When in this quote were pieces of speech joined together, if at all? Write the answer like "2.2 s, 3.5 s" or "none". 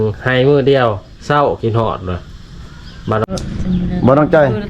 3.3 s